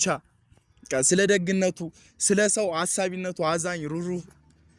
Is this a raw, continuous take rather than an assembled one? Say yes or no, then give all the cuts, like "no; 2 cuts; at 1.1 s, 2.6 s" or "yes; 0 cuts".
yes; 0 cuts